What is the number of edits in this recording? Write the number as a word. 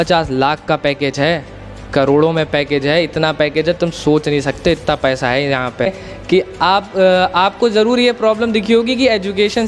one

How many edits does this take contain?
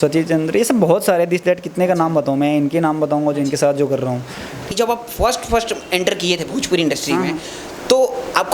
one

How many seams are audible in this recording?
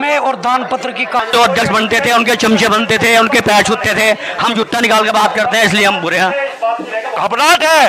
two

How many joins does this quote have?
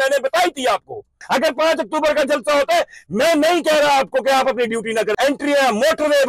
two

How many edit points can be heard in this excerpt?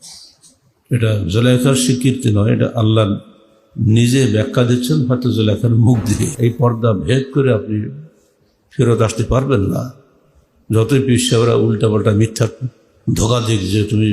one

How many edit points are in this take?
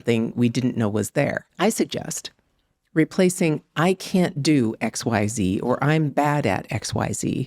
one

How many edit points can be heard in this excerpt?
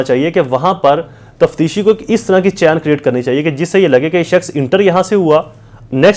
zero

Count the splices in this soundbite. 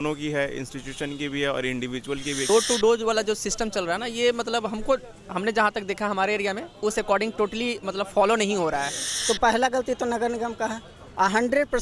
two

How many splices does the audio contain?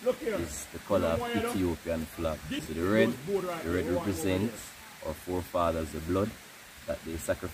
one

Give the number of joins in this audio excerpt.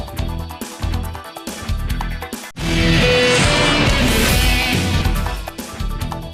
one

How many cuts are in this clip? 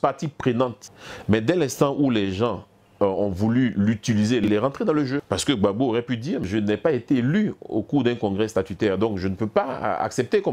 four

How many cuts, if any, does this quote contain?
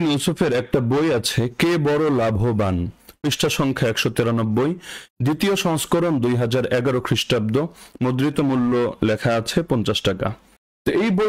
zero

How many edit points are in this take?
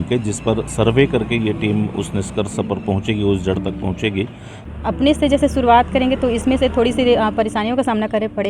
one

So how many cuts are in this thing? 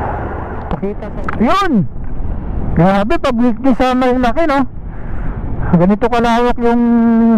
one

